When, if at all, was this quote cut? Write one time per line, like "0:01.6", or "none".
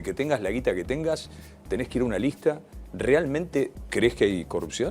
0:03.8